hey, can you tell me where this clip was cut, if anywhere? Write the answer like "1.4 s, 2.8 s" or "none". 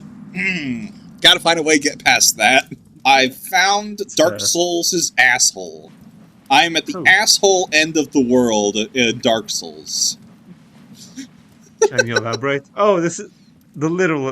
3.0 s